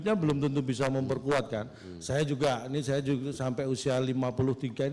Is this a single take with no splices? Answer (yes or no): yes